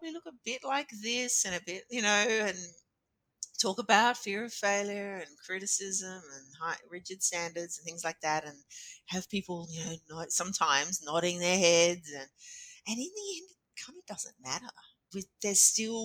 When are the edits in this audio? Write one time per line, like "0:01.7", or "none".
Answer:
0:15.0